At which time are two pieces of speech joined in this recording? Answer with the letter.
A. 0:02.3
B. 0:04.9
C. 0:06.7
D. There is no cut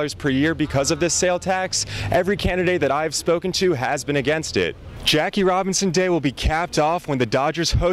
B